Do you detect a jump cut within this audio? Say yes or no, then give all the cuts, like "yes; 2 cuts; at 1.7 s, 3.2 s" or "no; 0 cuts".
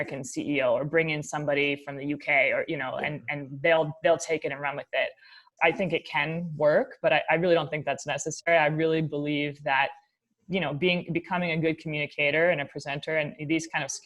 yes; 1 cut; at 5.4 s